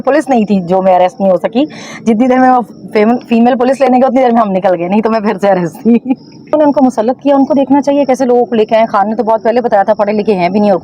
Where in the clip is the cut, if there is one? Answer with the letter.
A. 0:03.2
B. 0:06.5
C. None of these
B